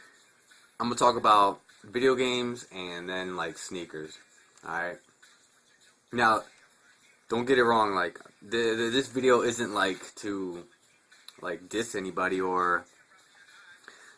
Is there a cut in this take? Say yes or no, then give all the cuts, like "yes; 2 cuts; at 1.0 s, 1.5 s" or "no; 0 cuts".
no; 0 cuts